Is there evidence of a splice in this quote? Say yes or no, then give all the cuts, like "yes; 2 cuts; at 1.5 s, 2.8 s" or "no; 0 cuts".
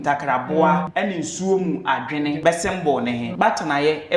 yes; 3 cuts; at 0.9 s, 2.4 s, 3.3 s